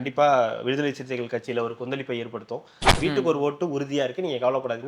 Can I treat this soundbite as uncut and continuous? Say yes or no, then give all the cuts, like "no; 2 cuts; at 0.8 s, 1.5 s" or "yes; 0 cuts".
no; 1 cut; at 2.9 s